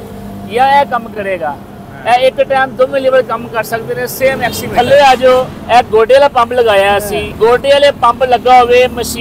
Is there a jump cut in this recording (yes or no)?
yes